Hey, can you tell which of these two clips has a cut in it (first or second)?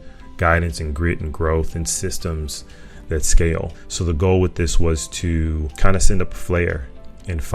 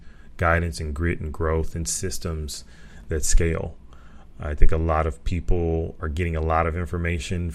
first